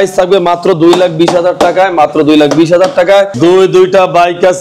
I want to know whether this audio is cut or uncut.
cut